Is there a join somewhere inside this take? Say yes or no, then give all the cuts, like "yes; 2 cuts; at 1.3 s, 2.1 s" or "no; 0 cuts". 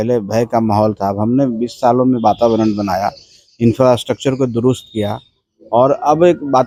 no; 0 cuts